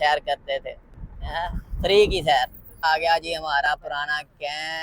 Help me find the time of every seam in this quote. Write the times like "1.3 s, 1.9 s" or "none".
2.8 s